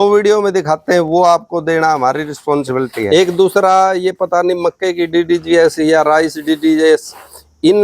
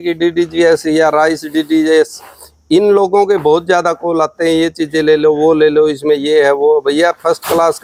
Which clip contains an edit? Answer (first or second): first